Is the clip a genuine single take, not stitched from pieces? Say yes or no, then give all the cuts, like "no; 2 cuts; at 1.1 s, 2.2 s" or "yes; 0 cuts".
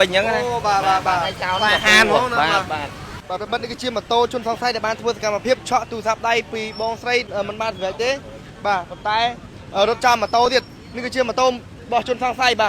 no; 2 cuts; at 3.3 s, 7.3 s